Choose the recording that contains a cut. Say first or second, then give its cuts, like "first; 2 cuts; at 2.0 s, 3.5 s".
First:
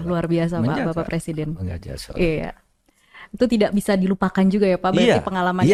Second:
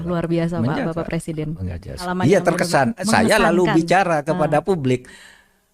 second; 1 cut; at 2.0 s